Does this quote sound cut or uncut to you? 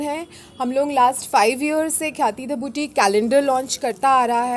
uncut